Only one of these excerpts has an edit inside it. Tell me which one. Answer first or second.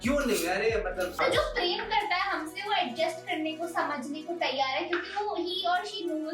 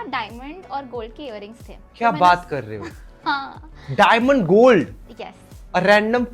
first